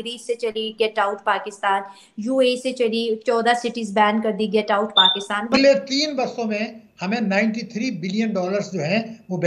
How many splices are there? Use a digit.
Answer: 1